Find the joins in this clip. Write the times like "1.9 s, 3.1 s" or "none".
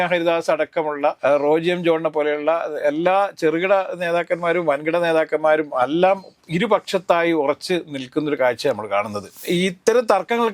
1.2 s, 9.4 s